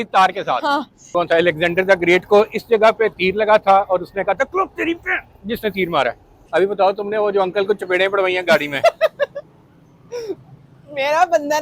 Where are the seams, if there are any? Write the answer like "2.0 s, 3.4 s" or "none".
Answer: 1.0 s, 6.3 s